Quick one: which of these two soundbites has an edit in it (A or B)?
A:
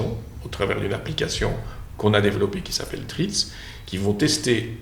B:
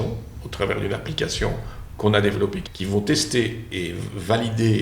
B